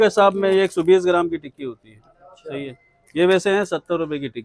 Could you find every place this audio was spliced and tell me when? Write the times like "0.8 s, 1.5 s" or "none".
none